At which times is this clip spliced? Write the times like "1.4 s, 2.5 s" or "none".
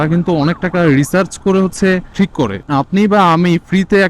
2.2 s